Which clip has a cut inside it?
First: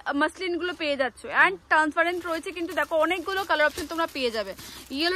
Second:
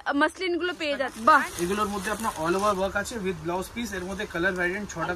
second; 1 cut; at 1.1 s

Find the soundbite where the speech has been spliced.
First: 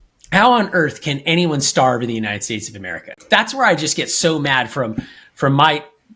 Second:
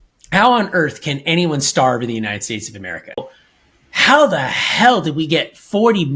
second; 1 cut; at 3.2 s

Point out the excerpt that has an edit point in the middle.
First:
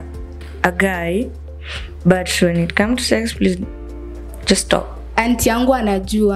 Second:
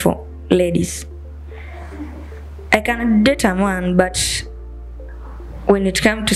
first; 1 cut; at 5.1 s

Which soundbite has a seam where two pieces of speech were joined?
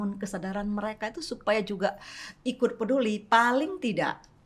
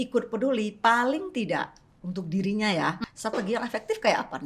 second; 1 cut; at 3.0 s

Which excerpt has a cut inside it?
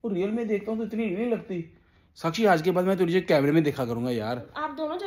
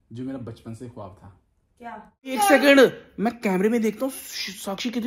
second; 1 cut; at 2.3 s

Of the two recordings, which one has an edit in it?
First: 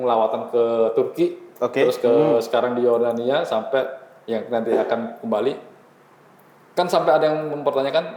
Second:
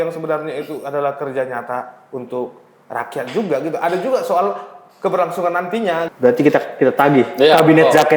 second; 1 cut; at 6.1 s

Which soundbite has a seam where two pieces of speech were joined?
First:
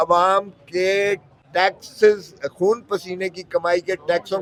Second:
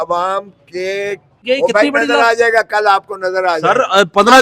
second; 1 cut; at 1.4 s

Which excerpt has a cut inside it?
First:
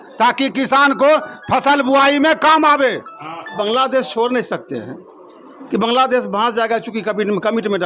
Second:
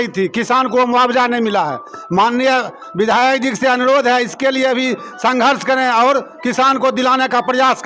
first; 1 cut; at 3.6 s

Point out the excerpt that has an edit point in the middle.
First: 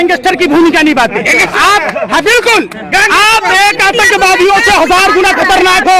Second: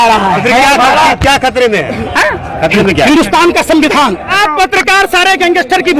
second; 1 cut; at 4.3 s

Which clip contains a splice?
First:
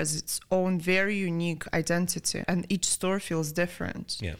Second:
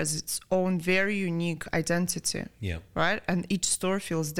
first; 1 cut; at 2.4 s

